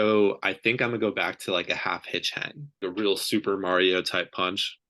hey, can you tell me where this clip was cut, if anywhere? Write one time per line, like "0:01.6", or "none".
0:02.8